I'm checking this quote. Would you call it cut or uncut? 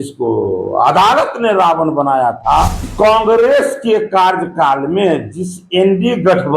cut